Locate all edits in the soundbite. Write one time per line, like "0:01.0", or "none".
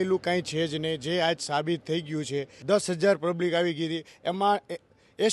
0:02.5